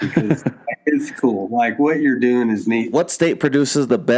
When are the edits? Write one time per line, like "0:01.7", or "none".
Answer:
0:02.9

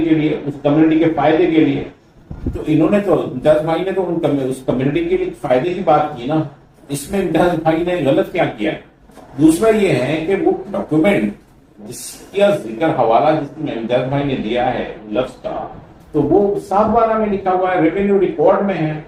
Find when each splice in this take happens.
none

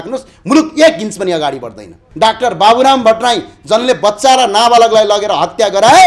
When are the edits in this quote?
0:02.0

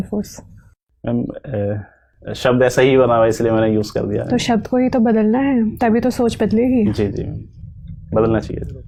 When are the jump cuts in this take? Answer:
none

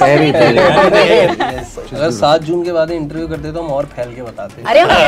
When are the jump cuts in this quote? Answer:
0:01.3

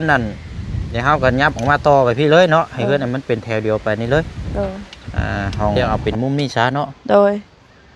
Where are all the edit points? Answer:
0:05.7

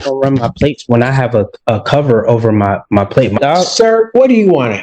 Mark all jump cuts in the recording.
0:03.4

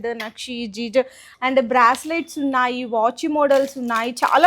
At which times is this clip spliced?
0:01.3

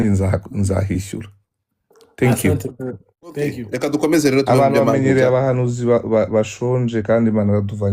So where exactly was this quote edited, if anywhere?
0:03.6

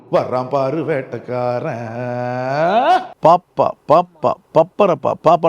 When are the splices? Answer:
0:03.1

